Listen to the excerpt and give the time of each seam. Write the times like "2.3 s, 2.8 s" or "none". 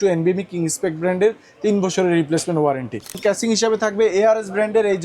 3.2 s